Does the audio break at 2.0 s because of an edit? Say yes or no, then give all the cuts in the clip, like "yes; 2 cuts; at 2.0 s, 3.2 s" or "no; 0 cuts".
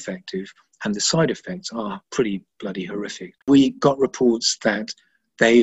yes; 2 cuts; at 2.0 s, 3.4 s